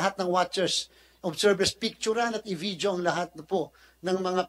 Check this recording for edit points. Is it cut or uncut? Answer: uncut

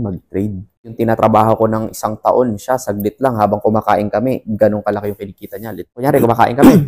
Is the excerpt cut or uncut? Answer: cut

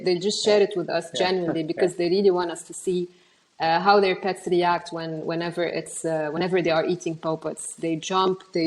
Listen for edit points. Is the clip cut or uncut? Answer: uncut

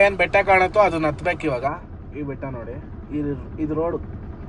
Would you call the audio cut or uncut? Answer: uncut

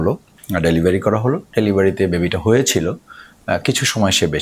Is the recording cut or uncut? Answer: uncut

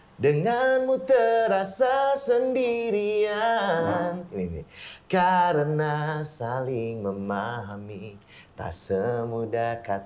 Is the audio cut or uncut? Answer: uncut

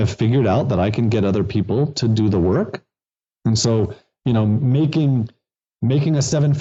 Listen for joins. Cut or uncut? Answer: uncut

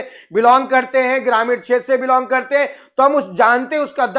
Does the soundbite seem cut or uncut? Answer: uncut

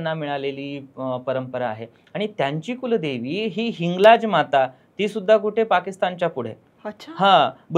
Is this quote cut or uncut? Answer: uncut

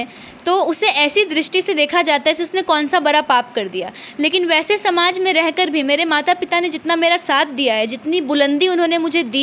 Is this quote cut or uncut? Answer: uncut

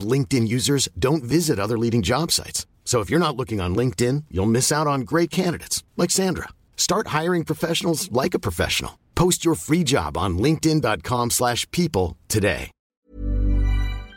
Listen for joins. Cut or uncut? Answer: cut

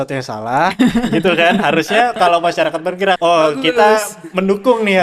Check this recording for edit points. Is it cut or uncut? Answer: cut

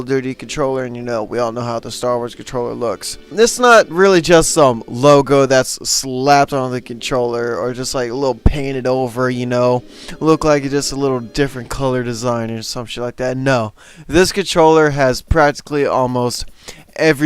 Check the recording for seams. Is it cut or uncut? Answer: cut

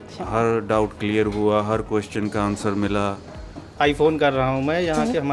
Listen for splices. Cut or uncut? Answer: cut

